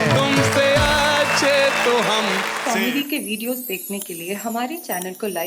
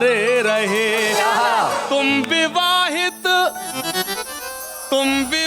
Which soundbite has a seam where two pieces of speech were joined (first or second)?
first